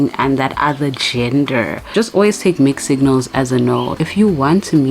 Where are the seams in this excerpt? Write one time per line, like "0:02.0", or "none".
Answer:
0:01.9
0:04.0